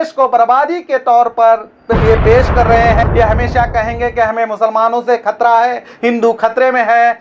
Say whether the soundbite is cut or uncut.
cut